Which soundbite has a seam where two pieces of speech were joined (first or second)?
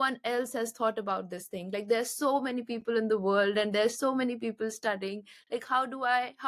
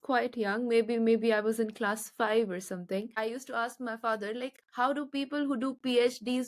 second